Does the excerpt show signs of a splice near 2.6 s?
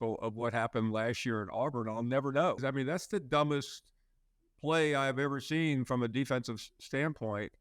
yes; 1 cut; at 2.6 s

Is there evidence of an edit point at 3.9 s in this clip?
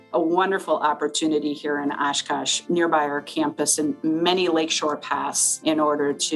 no; 2 cuts; at 2.6 s, 5.6 s

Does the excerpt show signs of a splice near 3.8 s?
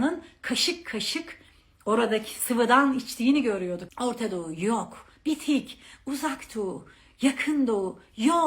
yes; 1 cut; at 3.8 s

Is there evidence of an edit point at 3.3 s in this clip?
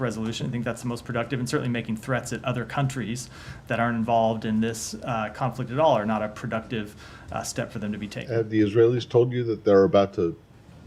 no; 1 cut; at 8.3 s

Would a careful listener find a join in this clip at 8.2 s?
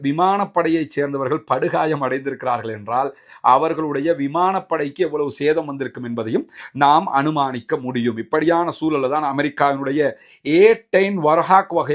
no; 0 cuts

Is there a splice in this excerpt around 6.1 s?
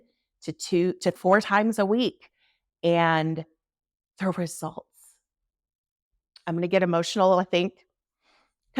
no; 1 cut; at 1.2 s

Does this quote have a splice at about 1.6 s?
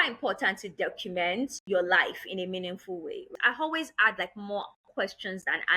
yes; 2 cuts; at 1.6 s, 3.3 s

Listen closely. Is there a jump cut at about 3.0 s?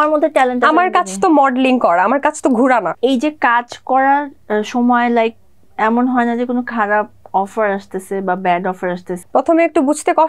yes; 2 cuts; at 3.0 s, 9.2 s

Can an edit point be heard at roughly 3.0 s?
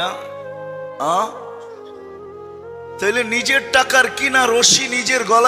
yes; 2 cuts; at 1.5 s, 3.0 s

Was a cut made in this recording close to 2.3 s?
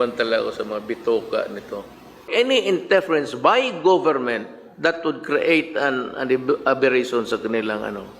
yes; 1 cut; at 2.3 s

